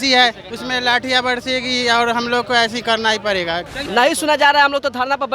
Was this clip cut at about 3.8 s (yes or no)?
yes